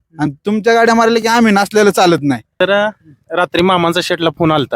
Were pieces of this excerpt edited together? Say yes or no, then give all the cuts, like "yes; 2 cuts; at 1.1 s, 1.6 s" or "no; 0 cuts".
yes; 1 cut; at 2.5 s